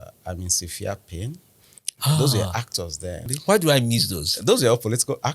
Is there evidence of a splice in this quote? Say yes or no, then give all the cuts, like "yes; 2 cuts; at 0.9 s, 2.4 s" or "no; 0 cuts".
yes; 1 cut; at 3.3 s